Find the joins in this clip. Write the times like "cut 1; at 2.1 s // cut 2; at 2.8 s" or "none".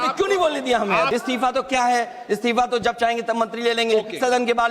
cut 1; at 1.1 s